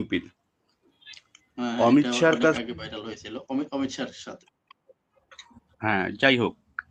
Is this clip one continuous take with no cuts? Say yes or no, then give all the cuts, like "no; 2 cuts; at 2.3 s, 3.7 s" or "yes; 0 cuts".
yes; 0 cuts